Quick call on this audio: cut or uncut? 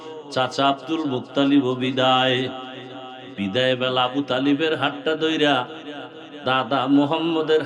uncut